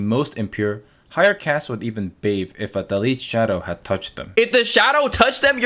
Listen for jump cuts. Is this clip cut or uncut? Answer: cut